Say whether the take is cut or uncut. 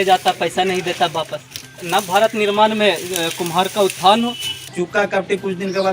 cut